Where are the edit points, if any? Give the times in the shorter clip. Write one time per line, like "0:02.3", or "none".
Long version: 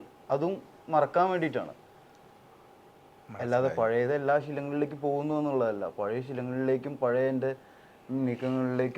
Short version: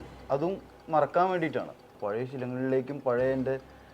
0:02.0